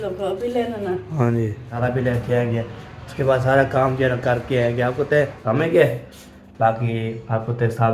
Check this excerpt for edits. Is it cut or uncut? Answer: cut